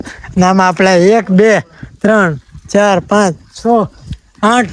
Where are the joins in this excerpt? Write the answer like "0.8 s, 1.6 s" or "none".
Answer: none